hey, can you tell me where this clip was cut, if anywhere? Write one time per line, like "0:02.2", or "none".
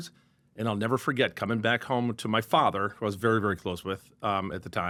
none